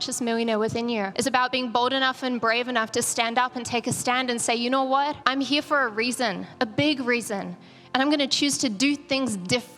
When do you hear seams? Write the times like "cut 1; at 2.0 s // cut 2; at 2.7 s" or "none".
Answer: cut 1; at 1.1 s // cut 2; at 5.2 s